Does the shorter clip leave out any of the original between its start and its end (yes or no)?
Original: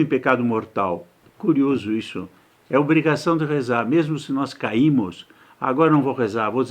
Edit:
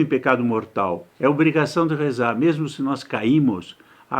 yes